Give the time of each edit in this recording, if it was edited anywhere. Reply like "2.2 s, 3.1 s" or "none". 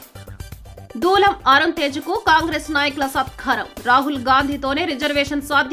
none